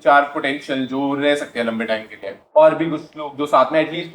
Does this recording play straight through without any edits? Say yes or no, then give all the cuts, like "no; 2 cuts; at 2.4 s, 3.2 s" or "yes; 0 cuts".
no; 1 cut; at 2.3 s